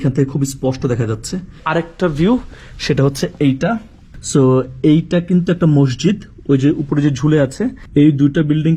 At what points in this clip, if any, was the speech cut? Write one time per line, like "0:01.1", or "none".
none